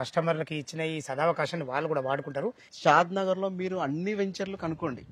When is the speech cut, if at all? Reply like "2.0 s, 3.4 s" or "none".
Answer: 2.7 s